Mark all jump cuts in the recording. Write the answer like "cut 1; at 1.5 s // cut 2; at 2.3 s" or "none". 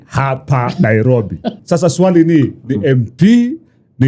cut 1; at 1.5 s